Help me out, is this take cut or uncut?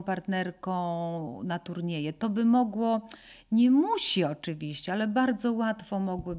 uncut